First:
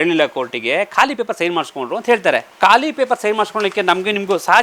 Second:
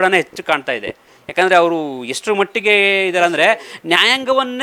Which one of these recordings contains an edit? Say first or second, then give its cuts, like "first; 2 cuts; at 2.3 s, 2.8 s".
first; 1 cut; at 2.5 s